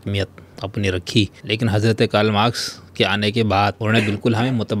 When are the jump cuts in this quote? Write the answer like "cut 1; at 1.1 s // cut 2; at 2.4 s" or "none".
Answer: cut 1; at 1.4 s // cut 2; at 3.8 s